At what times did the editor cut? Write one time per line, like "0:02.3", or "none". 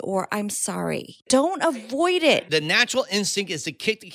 0:01.2
0:02.4